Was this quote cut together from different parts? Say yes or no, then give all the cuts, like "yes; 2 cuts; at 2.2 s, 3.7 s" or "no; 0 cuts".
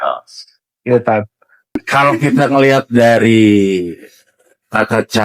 yes; 1 cut; at 1.8 s